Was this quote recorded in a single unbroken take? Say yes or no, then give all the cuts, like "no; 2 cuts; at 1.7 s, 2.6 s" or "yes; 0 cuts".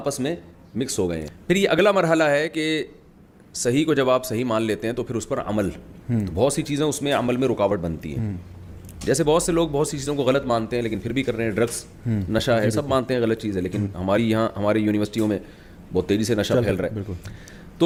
yes; 0 cuts